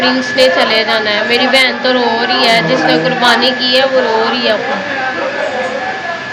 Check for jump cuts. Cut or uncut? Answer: uncut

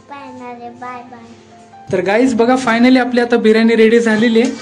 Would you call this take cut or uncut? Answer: cut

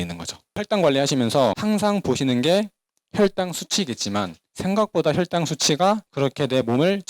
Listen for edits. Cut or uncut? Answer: cut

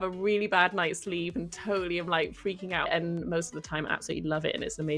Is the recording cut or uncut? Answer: cut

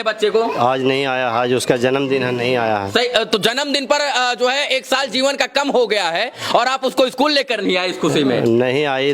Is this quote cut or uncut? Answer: uncut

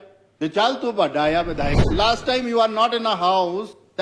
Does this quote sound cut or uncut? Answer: cut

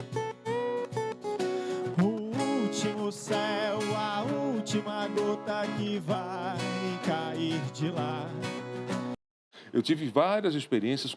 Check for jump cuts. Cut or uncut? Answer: cut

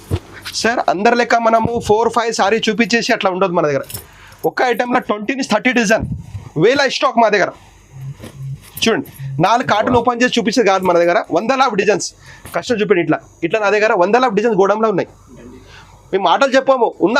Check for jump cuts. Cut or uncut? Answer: uncut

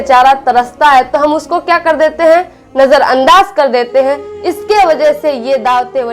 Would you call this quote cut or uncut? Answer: uncut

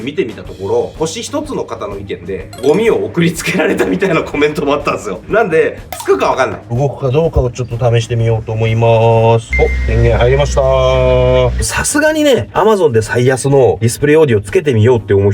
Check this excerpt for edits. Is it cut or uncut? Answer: cut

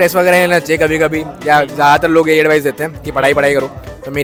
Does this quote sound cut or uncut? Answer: uncut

